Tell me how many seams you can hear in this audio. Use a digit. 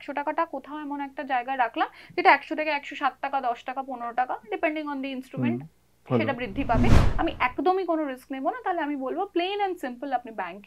1